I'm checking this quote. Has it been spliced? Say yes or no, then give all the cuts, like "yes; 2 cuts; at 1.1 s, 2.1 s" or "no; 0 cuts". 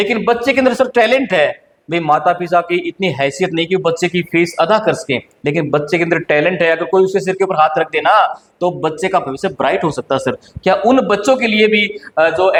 no; 0 cuts